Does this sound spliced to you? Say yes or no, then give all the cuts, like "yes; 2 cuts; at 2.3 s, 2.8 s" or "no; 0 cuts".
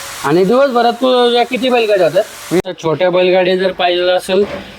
yes; 1 cut; at 2.7 s